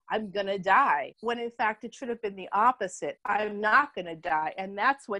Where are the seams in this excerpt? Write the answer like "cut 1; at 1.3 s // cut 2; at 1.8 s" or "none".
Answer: cut 1; at 1.1 s